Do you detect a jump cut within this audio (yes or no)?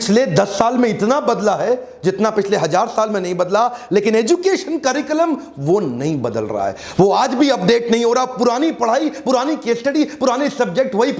no